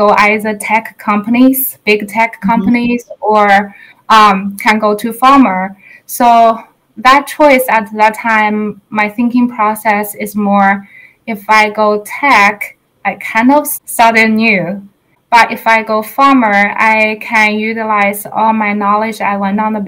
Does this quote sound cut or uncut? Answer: cut